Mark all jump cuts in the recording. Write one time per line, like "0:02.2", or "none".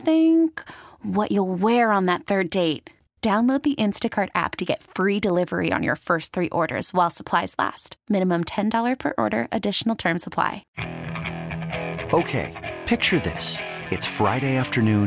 0:10.6

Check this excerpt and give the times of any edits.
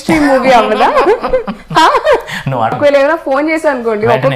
0:02.8

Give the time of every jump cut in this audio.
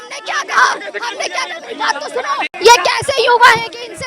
0:02.5

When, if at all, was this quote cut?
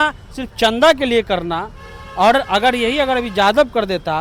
none

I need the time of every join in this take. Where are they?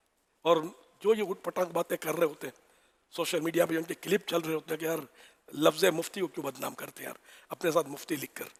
none

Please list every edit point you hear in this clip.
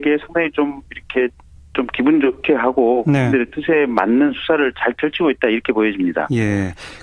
0:05.9

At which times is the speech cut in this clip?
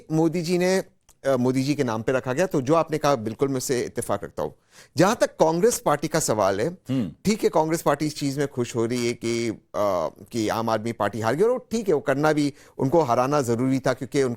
0:03.4

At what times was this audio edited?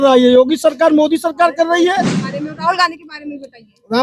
0:02.2

